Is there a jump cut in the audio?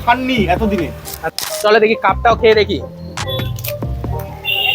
yes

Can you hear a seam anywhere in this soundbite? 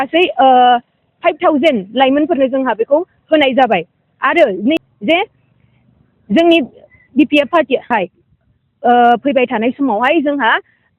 yes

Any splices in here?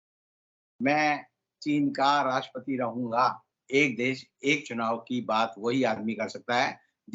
yes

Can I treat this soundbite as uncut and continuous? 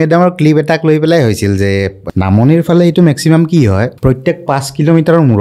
no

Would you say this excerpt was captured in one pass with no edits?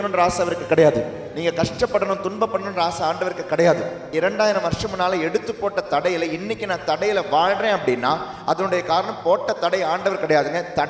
no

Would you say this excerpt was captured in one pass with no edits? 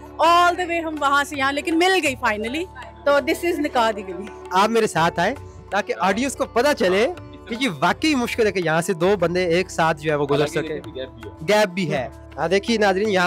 no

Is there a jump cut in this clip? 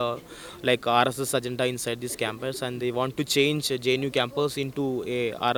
no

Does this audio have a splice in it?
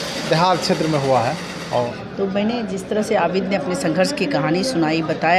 yes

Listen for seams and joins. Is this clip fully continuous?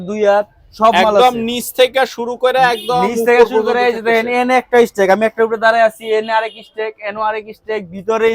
yes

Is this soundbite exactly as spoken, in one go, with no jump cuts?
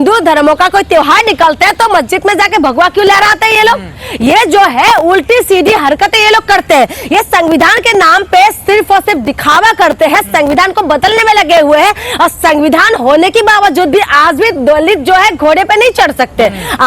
yes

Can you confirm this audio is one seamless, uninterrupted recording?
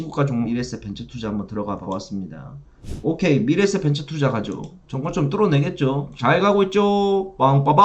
no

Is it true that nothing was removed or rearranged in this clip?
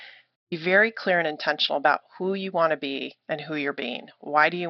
no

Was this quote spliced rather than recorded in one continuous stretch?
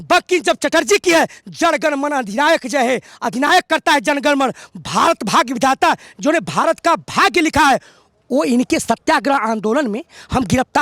no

